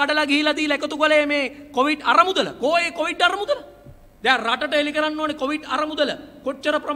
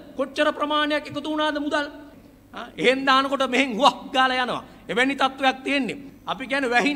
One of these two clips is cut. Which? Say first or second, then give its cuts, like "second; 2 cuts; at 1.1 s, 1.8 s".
second; 2 cuts; at 2.1 s, 6.1 s